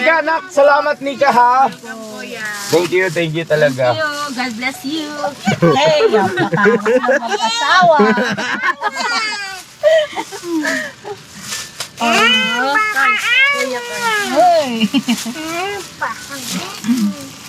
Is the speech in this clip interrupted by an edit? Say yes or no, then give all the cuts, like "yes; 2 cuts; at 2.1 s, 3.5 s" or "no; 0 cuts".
no; 0 cuts